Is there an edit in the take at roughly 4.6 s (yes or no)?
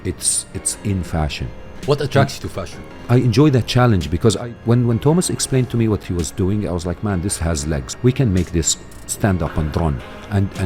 no